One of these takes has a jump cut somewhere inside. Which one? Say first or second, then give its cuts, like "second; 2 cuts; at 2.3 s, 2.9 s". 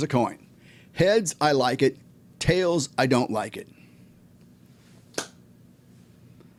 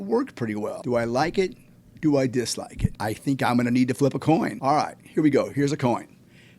second; 3 cuts; at 0.8 s, 3.0 s, 4.6 s